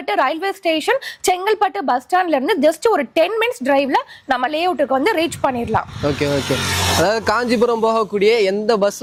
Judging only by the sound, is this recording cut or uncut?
uncut